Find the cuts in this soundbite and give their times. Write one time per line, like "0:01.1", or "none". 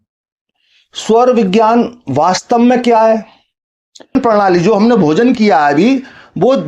0:04.1